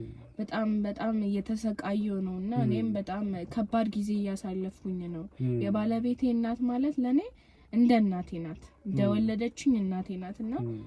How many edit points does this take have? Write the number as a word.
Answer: zero